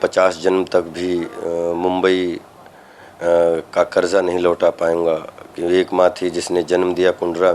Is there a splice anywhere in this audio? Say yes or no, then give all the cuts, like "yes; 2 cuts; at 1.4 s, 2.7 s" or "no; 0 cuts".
no; 0 cuts